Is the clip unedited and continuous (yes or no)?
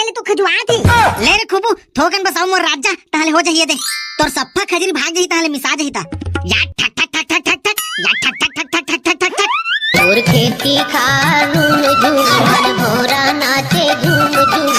yes